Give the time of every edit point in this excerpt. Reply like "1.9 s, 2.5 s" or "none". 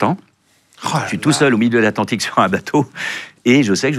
none